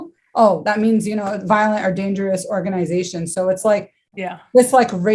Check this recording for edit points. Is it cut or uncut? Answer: uncut